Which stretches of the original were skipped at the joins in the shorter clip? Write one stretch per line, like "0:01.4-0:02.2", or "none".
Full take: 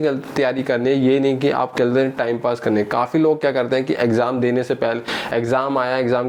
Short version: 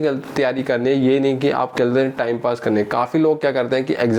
none